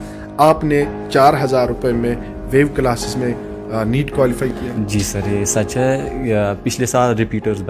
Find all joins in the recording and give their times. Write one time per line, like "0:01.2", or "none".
none